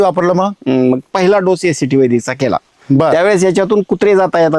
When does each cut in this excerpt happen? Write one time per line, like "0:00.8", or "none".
0:01.1